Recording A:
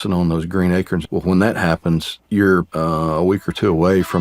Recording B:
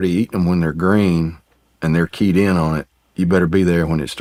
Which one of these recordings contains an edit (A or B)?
A